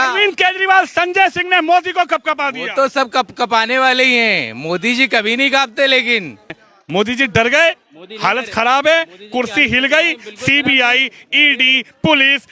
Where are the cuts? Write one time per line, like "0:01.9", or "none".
0:06.6